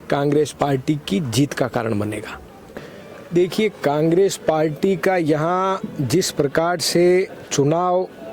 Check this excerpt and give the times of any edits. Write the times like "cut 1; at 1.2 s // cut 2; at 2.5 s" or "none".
cut 1; at 2.6 s